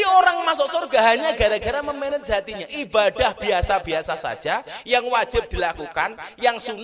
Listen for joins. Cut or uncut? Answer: uncut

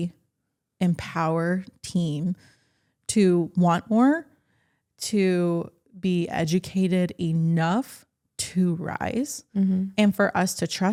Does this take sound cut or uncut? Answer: uncut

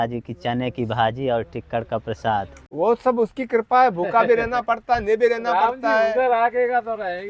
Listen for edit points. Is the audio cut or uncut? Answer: cut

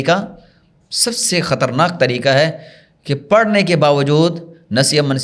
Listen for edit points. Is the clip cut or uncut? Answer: uncut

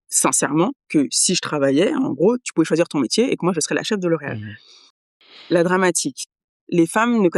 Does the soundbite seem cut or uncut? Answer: cut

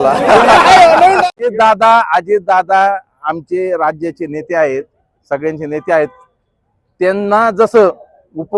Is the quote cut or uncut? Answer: cut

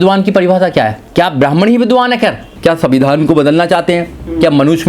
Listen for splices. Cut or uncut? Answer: cut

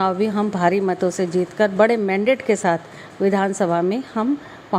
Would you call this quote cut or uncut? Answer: uncut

